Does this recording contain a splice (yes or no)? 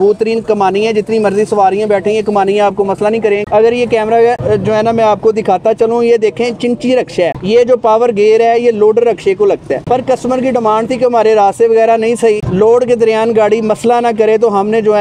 no